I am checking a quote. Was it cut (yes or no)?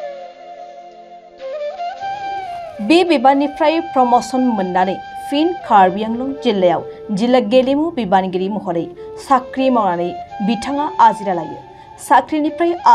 yes